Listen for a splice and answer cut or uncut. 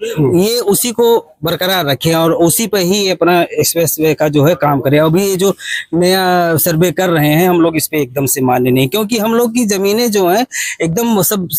uncut